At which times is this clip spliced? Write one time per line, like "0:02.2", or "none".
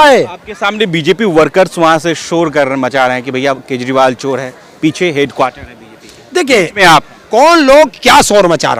none